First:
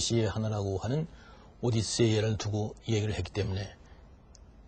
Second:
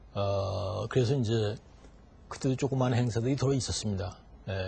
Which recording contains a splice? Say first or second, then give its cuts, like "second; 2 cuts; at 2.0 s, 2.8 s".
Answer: first; 1 cut; at 3.2 s